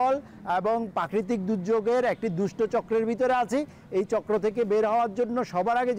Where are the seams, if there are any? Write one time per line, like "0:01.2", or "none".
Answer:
none